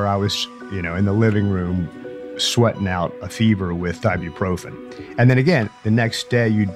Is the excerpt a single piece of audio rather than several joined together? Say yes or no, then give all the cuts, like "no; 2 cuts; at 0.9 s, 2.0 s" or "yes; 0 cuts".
yes; 0 cuts